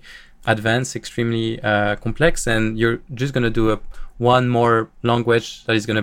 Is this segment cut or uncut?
uncut